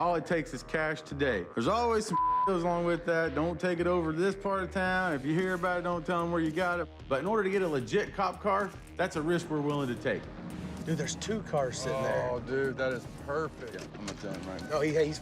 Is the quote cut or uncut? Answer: cut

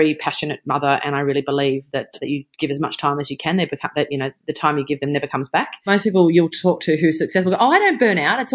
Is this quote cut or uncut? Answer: cut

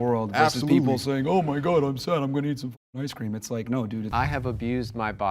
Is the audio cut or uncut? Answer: cut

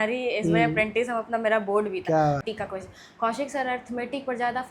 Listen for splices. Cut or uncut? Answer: cut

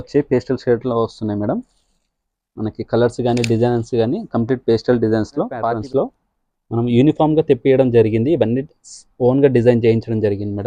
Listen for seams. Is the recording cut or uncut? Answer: cut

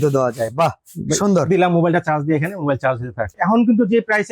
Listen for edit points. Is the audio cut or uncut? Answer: cut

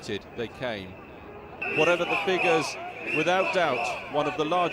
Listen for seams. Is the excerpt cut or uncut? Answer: cut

